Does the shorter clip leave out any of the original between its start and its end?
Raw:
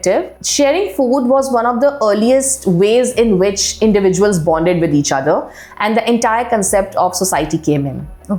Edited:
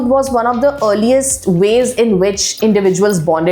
no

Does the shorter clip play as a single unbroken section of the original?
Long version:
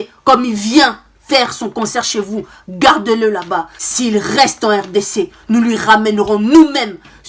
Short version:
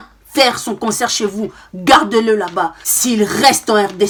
yes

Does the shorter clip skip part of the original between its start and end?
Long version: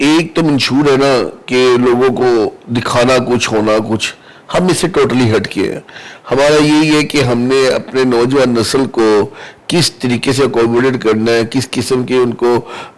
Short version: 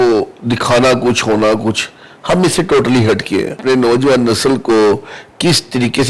yes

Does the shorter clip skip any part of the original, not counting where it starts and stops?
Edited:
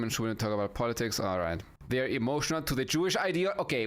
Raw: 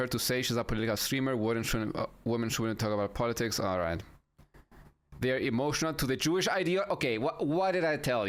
yes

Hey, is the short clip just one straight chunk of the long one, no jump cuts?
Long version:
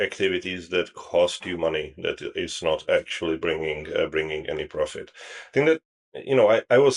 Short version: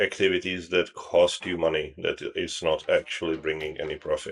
no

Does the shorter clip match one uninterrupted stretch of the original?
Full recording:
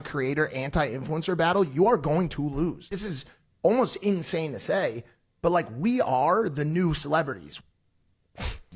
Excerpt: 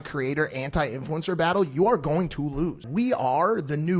no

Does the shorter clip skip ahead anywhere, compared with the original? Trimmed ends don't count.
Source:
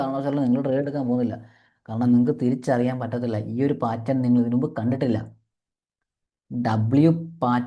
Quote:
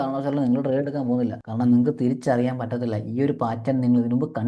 yes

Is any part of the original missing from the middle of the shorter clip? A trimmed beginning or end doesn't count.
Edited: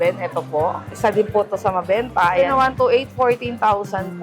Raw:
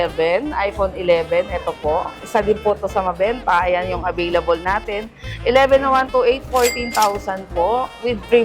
yes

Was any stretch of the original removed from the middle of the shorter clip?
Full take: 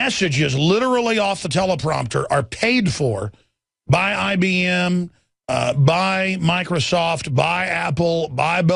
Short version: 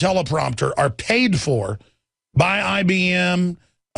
no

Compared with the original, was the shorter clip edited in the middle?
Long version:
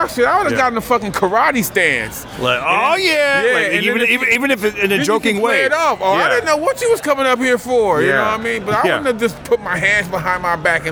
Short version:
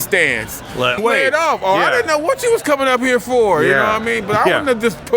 yes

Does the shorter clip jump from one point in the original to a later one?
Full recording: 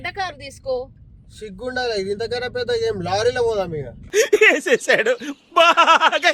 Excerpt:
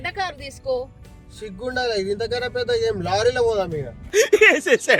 no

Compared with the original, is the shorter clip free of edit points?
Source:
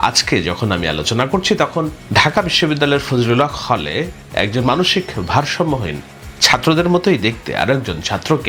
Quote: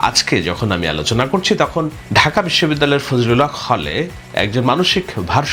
yes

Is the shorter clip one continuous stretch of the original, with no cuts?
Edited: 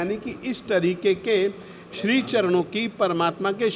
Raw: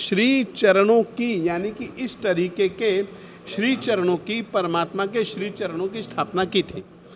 yes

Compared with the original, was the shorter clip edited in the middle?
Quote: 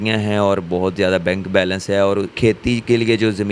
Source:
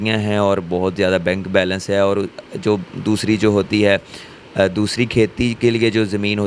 yes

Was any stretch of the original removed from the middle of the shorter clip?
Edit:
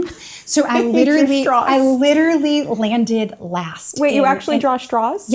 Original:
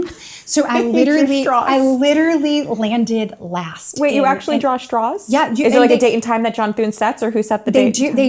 no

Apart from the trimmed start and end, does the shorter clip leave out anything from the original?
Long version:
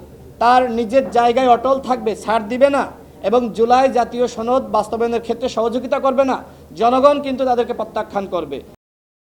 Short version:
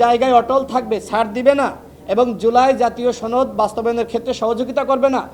no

